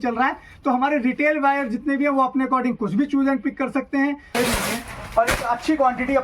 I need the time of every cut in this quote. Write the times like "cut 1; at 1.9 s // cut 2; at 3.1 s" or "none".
cut 1; at 4.2 s